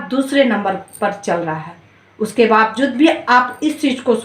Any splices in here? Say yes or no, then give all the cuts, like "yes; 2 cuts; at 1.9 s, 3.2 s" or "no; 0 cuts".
yes; 1 cut; at 1.9 s